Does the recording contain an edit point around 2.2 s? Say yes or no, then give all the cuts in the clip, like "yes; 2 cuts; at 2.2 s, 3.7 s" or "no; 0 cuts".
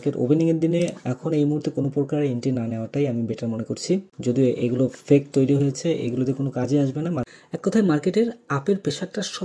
no; 2 cuts; at 4.1 s, 7.3 s